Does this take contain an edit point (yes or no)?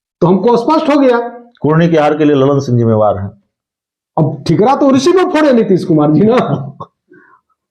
no